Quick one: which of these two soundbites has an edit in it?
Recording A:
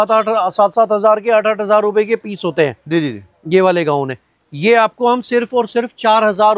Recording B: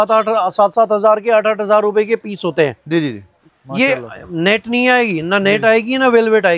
B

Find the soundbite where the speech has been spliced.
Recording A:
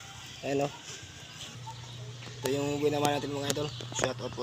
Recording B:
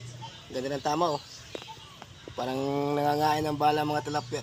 A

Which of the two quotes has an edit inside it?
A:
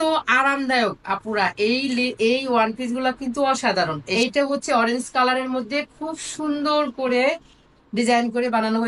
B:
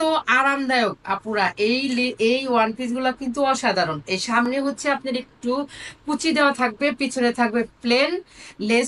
A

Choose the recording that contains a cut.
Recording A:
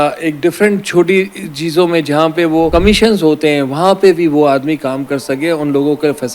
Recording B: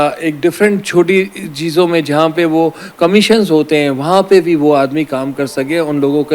A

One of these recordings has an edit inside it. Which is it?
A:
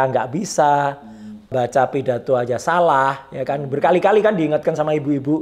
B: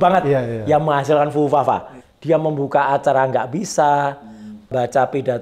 B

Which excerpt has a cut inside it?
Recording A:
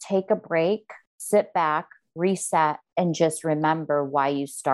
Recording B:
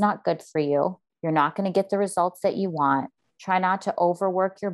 A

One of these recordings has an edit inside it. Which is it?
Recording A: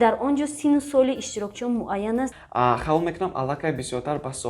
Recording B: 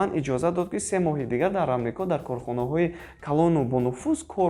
A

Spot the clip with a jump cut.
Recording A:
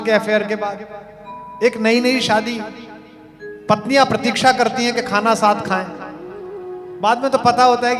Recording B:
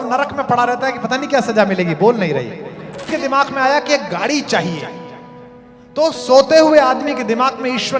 B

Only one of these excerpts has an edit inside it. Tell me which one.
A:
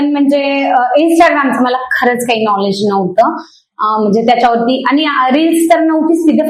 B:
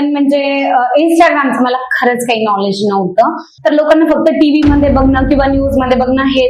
B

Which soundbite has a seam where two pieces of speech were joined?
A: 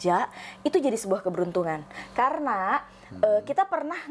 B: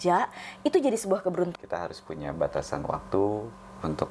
B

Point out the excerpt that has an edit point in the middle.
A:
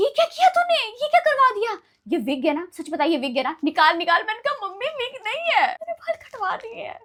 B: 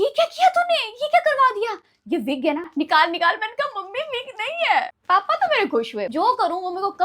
B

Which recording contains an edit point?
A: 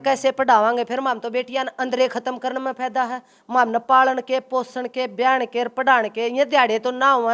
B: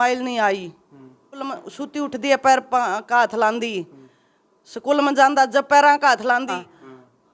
B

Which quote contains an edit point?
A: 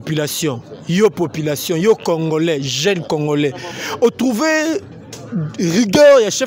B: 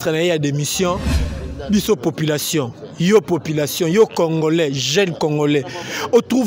B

